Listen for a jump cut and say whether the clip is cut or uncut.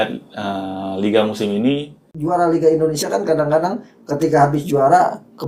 cut